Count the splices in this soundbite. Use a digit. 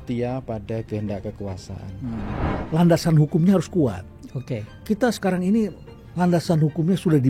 1